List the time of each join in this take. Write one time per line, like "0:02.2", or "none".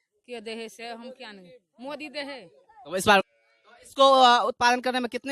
0:03.2